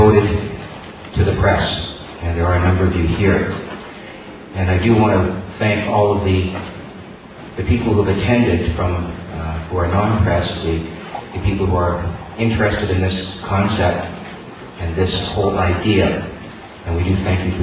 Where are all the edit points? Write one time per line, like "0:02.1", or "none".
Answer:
none